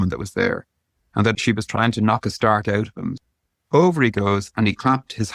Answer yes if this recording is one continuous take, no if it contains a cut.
no